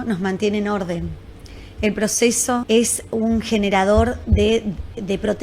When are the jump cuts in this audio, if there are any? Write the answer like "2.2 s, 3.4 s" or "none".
2.6 s